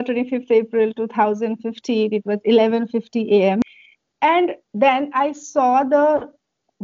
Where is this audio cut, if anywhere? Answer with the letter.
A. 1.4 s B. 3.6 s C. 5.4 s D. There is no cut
B